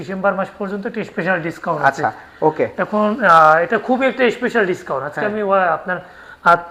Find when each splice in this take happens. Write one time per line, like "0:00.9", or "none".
none